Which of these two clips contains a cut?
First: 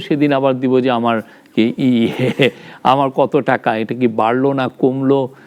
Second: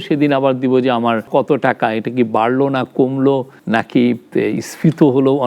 second; 2 cuts; at 1.3 s, 3.5 s

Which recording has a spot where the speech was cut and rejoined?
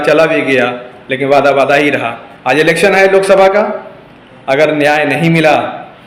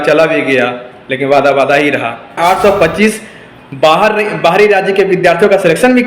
second; 1 cut; at 2.4 s

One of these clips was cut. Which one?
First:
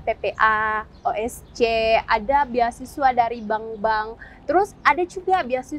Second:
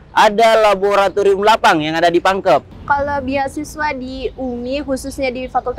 second; 1 cut; at 2.7 s

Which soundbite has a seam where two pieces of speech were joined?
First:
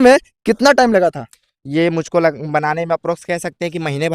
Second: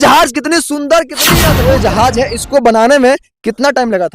second; 1 cut; at 1.3 s

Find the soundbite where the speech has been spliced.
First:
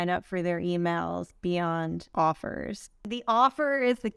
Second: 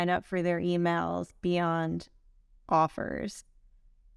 first; 2 cuts; at 2.0 s, 3.1 s

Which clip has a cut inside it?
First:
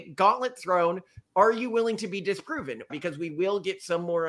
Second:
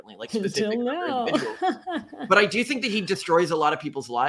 first; 1 cut; at 2.9 s

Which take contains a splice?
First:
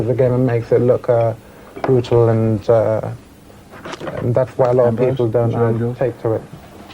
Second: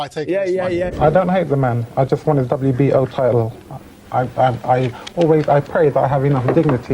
second; 1 cut; at 0.9 s

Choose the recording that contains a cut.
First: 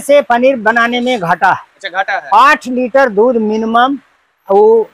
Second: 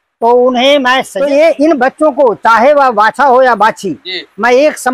second; 1 cut; at 1.1 s

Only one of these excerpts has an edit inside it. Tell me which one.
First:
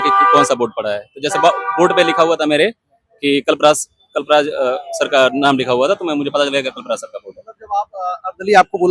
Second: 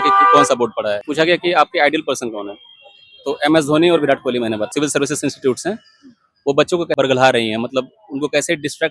second; 3 cuts; at 1.1 s, 4.7 s, 7.0 s

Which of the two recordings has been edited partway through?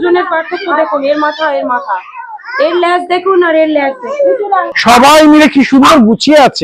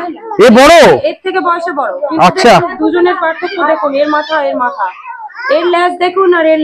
first; 1 cut; at 4.7 s

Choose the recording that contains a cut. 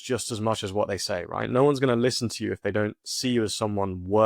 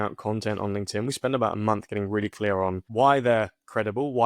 second; 1 cut; at 2.8 s

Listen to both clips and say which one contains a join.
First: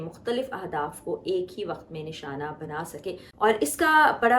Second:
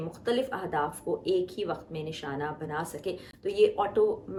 first; 1 cut; at 3.2 s

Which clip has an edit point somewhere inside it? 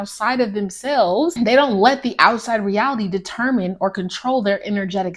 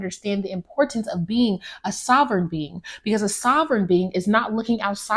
first; 1 cut; at 1.3 s

